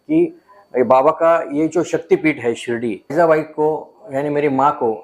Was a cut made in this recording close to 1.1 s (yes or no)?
no